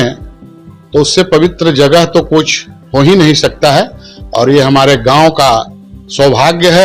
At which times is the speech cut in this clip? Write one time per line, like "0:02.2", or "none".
none